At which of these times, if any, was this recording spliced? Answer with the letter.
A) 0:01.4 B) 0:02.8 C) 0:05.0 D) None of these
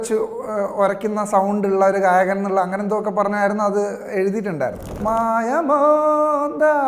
C